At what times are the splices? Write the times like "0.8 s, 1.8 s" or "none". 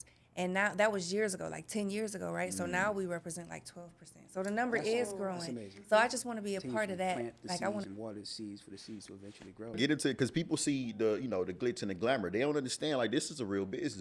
7.8 s, 9.8 s